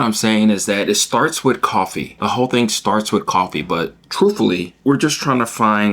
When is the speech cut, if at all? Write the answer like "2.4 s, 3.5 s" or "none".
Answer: 2.0 s, 4.7 s